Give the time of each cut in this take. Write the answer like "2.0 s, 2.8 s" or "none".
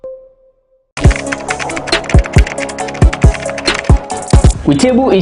1.0 s